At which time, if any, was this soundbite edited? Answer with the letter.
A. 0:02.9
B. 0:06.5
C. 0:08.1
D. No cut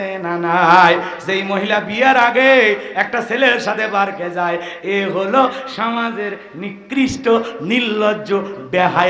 D